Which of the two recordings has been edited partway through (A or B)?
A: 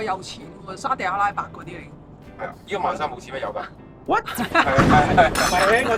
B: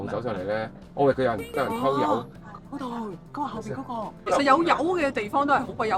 B